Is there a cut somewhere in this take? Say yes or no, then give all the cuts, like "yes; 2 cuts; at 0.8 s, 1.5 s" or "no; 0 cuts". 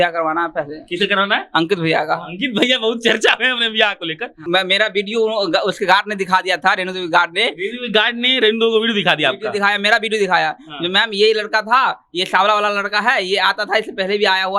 yes; 1 cut; at 4.4 s